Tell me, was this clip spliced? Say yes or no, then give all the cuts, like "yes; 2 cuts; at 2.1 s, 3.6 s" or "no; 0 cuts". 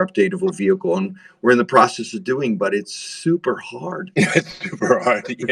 no; 0 cuts